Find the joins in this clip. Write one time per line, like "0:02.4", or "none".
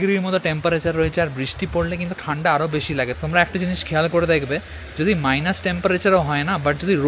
none